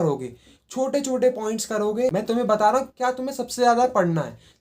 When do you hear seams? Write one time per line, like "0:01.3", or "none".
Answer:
0:02.1